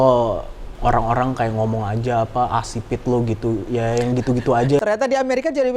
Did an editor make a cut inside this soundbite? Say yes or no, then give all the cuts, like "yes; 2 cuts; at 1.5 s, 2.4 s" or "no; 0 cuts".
yes; 1 cut; at 4.8 s